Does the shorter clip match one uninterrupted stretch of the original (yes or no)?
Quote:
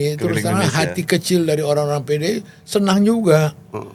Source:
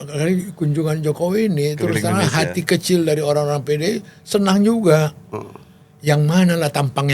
yes